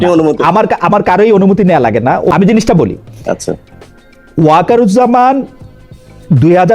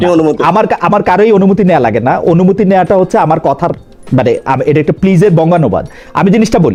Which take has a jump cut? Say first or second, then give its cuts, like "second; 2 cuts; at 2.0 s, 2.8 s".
first; 1 cut; at 2.3 s